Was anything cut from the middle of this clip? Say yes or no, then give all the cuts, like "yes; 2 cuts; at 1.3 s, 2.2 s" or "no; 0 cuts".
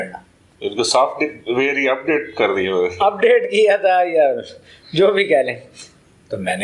no; 0 cuts